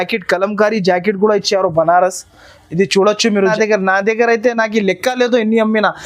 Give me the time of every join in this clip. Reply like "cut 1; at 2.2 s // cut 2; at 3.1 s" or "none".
cut 1; at 3.4 s